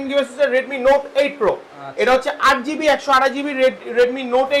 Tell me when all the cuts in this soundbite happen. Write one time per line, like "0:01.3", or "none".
none